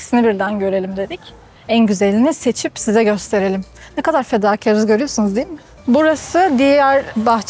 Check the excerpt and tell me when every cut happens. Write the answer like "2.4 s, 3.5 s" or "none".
none